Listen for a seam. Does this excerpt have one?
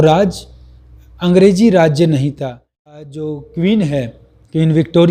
yes; 1 cut; at 2.9 s

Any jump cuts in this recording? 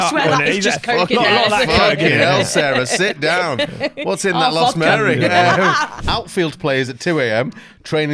yes; 1 cut; at 6.0 s

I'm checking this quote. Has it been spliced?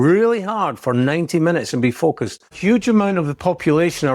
yes; 1 cut; at 2.5 s

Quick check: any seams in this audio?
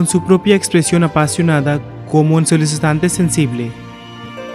yes; 2 cuts; at 1.9 s, 3.8 s

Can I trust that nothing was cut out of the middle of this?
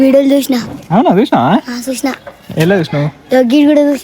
yes; 0 cuts

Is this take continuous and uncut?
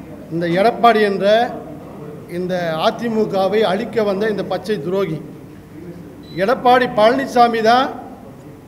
yes; 0 cuts

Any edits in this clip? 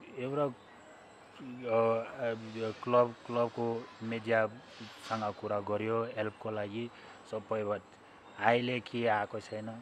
no; 0 cuts

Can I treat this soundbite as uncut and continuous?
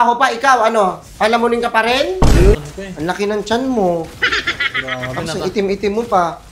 no; 1 cut; at 2.5 s

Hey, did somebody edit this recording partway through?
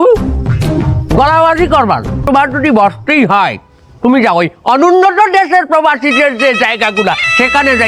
yes; 1 cut; at 2.2 s

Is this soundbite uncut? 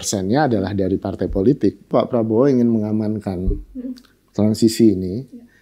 no; 1 cut; at 1.9 s

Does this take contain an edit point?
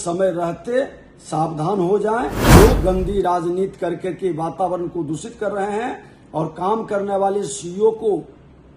yes; 1 cut; at 2.4 s

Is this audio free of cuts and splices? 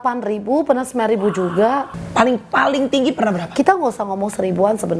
no; 1 cut; at 1.9 s

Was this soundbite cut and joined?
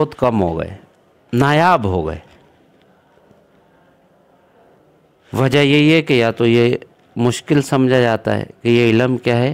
no; 0 cuts

